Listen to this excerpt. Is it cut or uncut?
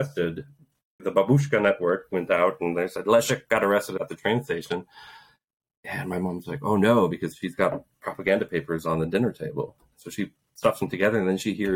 uncut